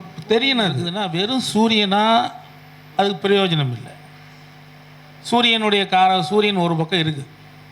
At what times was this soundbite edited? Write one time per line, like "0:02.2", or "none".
0:00.9